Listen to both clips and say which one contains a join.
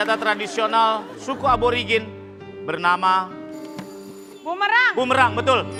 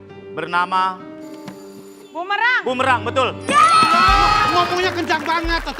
second; 1 cut; at 4.5 s

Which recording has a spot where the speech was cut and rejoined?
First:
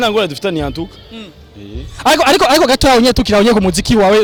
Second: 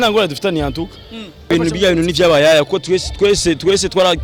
second; 1 cut; at 1.5 s

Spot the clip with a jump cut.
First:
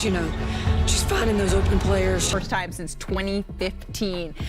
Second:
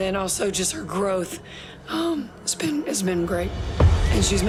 first; 1 cut; at 2.3 s

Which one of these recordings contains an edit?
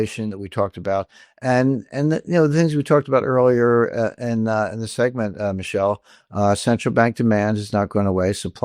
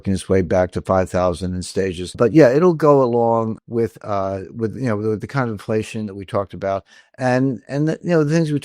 second; 2 cuts; at 2.2 s, 3.6 s

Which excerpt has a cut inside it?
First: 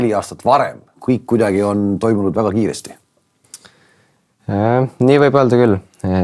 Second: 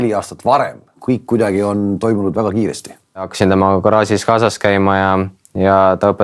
second; 1 cut; at 3.3 s

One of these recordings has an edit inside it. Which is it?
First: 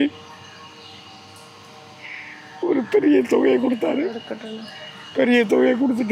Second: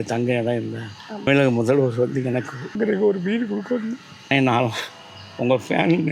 second; 3 cuts; at 1.3 s, 2.7 s, 4.1 s

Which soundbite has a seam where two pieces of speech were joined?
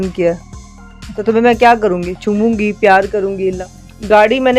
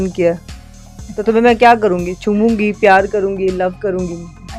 first; 1 cut; at 3.7 s

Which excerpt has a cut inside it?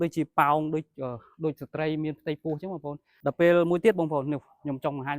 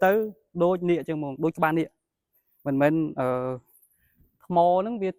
first; 1 cut; at 3.0 s

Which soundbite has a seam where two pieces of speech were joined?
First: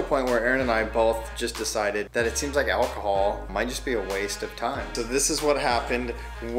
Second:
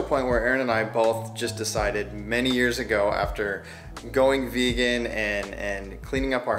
first; 3 cuts; at 2.1 s, 3.5 s, 4.9 s

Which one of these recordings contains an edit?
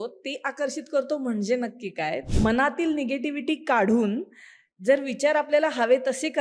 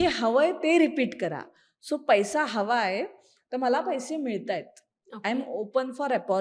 first; 1 cut; at 2.3 s

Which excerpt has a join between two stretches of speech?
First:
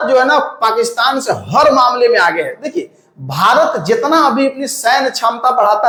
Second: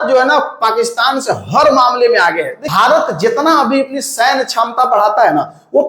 second; 1 cut; at 2.6 s

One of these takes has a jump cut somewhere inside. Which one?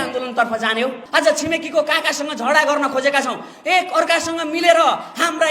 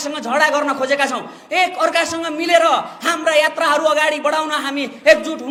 first; 1 cut; at 1.0 s

